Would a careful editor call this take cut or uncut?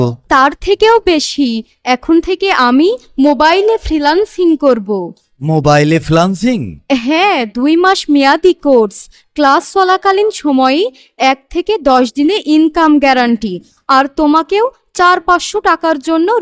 uncut